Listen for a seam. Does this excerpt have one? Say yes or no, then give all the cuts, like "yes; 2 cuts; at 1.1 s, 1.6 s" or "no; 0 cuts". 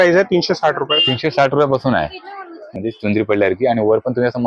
yes; 1 cut; at 2.7 s